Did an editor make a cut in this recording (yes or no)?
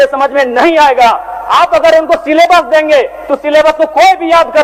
no